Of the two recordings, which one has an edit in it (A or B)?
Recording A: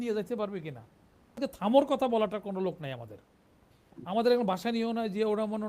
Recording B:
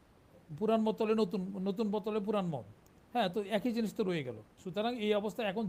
A